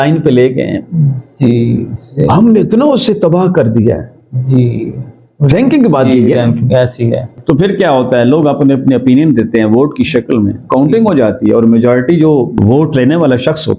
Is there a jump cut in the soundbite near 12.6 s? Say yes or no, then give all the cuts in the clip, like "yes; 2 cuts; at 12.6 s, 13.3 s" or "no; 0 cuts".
yes; 2 cuts; at 7.3 s, 12.6 s